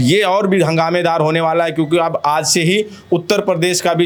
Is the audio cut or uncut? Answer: uncut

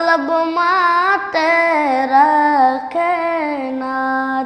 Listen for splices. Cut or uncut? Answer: uncut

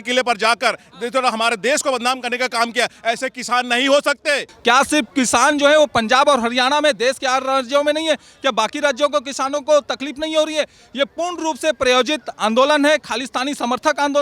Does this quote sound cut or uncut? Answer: cut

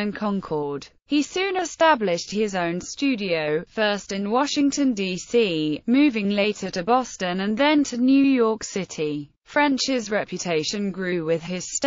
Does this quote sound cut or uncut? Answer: cut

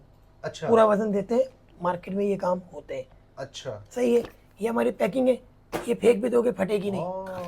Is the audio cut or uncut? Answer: uncut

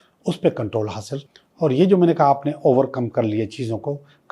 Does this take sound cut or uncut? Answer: cut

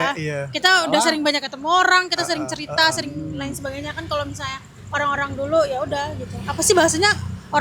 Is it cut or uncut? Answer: uncut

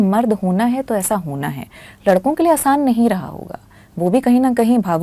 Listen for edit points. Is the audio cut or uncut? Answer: uncut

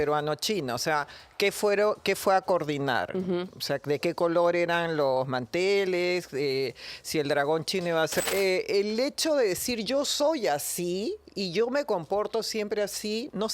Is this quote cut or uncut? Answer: cut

